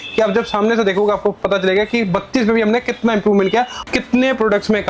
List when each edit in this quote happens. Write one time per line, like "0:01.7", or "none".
0:03.8